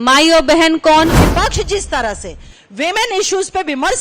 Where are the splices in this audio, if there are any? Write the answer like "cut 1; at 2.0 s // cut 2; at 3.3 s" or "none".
cut 1; at 1.2 s